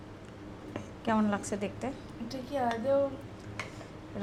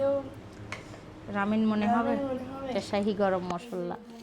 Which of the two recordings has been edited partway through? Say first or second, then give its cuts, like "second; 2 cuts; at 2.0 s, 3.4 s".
second; 1 cut; at 2.7 s